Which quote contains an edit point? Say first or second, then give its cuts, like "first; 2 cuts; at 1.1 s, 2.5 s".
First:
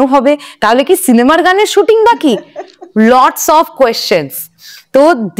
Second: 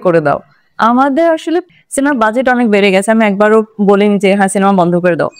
second; 1 cut; at 1.7 s